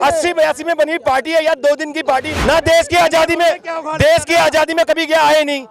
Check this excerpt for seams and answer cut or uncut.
cut